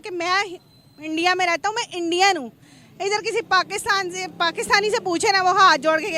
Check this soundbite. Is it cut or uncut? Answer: uncut